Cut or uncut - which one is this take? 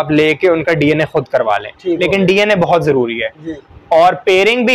uncut